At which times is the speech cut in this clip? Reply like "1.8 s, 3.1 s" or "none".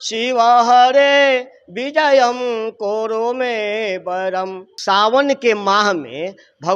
4.7 s

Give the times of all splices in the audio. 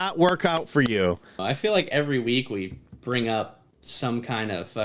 1.4 s

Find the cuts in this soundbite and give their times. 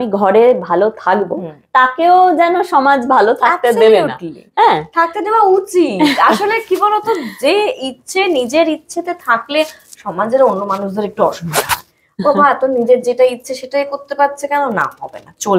none

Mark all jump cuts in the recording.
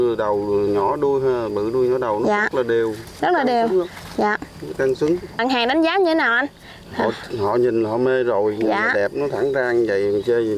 5.4 s

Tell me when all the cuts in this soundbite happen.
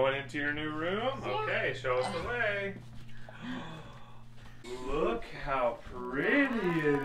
4.6 s

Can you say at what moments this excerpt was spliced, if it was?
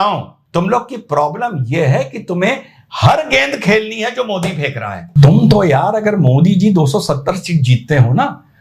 5.1 s

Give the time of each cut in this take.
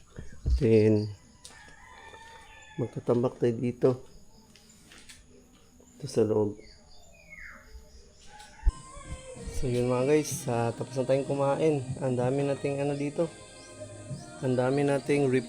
8.7 s

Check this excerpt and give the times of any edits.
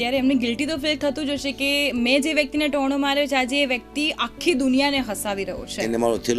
none

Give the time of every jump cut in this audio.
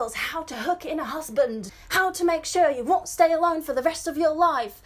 1.8 s

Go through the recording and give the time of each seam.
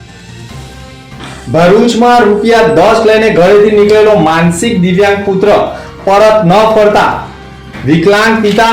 0.9 s

